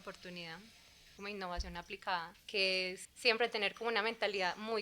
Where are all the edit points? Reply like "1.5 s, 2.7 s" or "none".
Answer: 1.1 s, 2.8 s